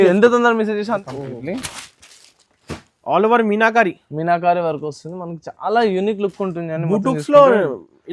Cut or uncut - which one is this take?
cut